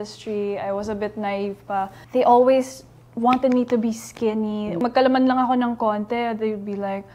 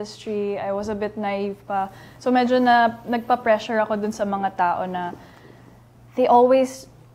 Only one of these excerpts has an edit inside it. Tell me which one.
first; 2 cuts; at 2.0 s, 4.8 s

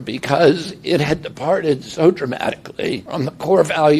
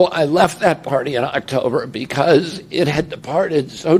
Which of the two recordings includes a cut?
first; 1 cut; at 3.0 s

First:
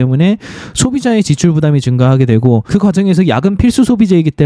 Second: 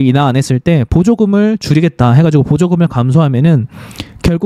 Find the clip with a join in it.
first; 1 cut; at 2.6 s

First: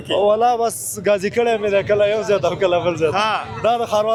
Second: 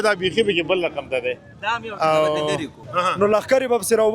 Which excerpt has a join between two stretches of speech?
second; 1 cut; at 2.9 s

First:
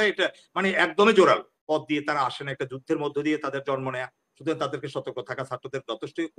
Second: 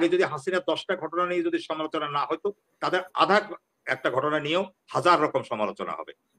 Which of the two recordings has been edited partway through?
first; 1 cut; at 1.5 s

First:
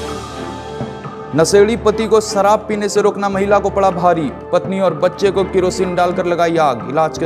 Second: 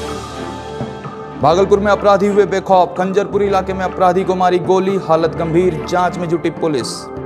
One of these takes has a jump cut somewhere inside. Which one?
second; 1 cut; at 1.1 s

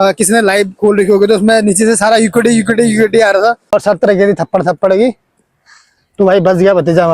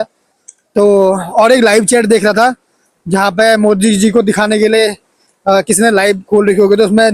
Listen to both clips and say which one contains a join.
first; 1 cut; at 3.7 s

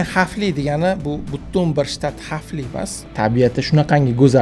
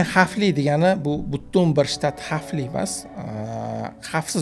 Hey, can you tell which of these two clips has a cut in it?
first; 1 cut; at 3.1 s

